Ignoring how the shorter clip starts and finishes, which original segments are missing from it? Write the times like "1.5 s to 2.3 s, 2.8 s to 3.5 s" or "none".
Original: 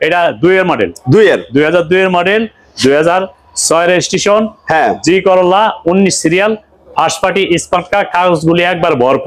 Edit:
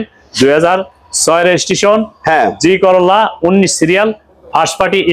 none